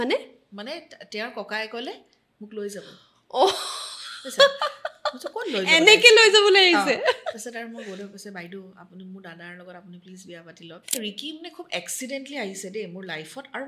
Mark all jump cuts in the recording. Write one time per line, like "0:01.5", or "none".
0:11.0